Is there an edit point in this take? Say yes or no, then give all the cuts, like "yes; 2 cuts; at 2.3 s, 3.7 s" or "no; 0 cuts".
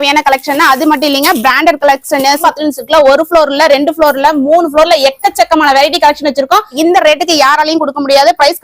yes; 2 cuts; at 2.4 s, 6.7 s